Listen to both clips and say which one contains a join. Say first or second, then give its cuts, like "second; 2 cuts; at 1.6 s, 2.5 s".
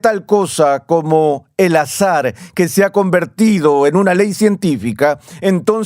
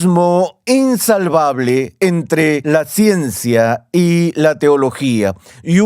second; 1 cut; at 2.6 s